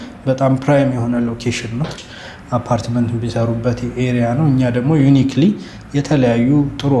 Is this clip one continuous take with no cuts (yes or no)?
no